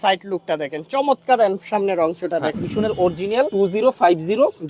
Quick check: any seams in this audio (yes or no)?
yes